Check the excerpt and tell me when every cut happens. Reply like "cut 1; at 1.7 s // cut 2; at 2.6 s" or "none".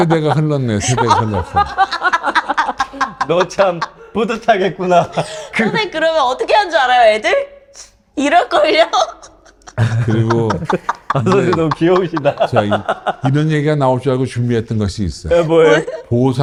none